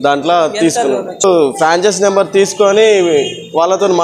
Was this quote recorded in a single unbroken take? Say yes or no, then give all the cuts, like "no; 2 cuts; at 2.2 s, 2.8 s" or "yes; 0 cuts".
no; 1 cut; at 1.2 s